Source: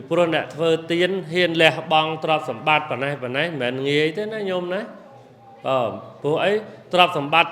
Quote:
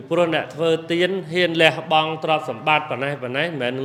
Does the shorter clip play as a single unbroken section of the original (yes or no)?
yes